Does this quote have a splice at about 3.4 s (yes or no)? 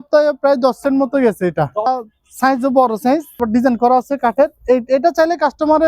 yes